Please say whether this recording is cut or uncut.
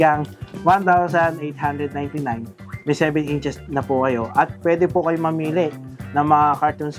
uncut